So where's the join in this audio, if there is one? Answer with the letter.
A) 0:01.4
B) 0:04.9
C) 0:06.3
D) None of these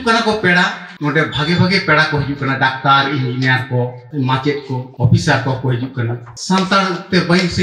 C